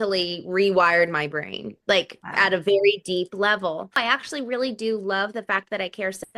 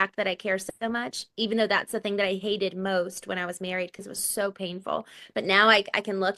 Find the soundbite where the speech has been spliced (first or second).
first